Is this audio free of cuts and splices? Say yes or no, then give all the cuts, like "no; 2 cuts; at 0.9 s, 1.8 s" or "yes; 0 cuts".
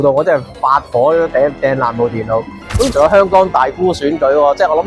no; 1 cut; at 2.9 s